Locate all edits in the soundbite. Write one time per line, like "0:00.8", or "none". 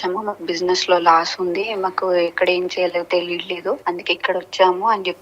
0:03.8